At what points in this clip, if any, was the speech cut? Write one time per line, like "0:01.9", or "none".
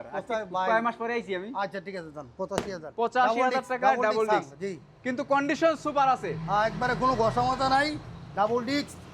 none